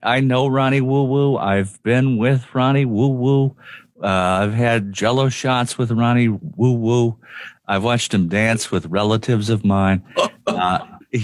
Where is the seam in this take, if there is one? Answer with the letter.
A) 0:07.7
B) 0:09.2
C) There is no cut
C